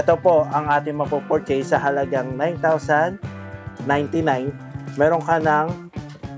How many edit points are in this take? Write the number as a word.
zero